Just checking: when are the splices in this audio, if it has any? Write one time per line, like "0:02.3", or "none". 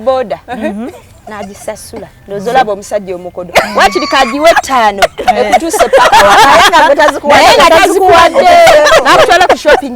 0:08.9